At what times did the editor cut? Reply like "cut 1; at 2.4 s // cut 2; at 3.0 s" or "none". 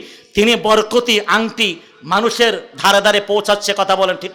none

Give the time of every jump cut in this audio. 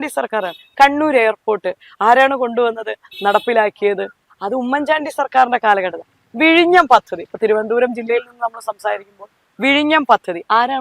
none

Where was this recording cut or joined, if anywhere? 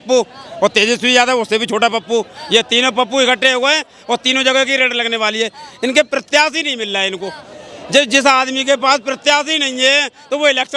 none

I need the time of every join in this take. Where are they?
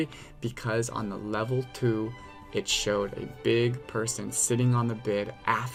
none

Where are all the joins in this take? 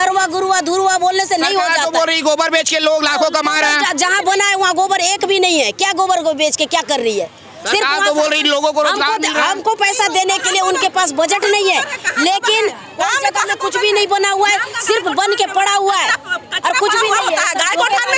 none

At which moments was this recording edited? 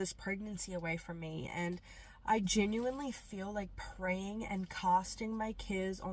none

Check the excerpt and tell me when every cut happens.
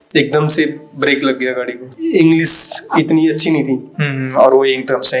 cut 1; at 1.9 s

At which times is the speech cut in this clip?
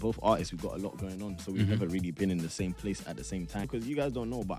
cut 1; at 3.7 s

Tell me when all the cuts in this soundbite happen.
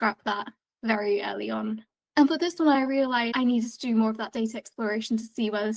cut 1; at 3.3 s

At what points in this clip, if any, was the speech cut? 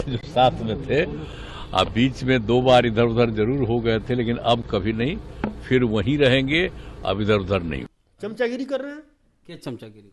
cut 1; at 7.9 s

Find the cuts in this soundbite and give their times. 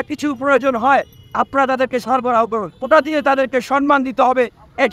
cut 1; at 2.7 s

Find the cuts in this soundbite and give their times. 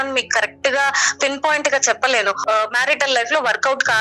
cut 1; at 2.4 s

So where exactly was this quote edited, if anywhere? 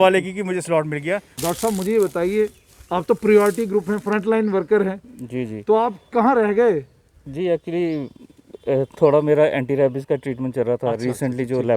cut 1; at 1.3 s

